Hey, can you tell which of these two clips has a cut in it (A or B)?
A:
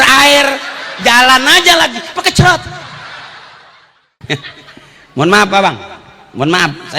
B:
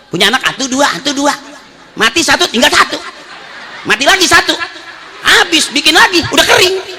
A